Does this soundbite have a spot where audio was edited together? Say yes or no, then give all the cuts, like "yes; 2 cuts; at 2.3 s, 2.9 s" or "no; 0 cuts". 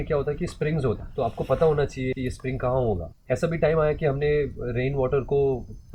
yes; 3 cuts; at 1.1 s, 2.1 s, 3.1 s